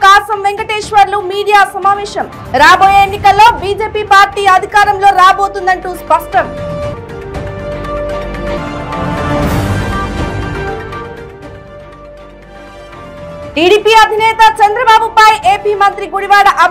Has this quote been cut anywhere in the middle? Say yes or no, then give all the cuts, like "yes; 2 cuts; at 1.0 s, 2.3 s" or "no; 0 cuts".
no; 0 cuts